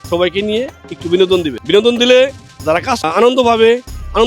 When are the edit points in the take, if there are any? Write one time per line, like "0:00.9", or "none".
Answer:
0:01.6
0:03.0